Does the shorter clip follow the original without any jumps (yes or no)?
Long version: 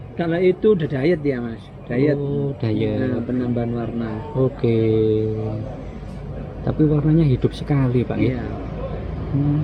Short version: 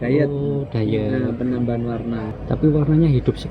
no